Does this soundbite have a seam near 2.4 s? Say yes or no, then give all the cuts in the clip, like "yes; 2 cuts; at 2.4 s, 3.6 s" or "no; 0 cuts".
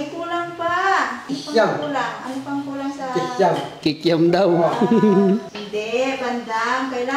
no; 3 cuts; at 1.2 s, 3.7 s, 5.6 s